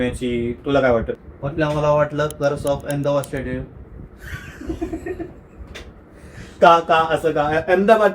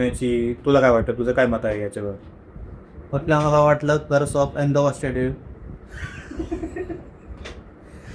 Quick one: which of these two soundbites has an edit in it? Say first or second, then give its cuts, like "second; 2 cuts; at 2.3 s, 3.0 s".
first; 1 cut; at 1.1 s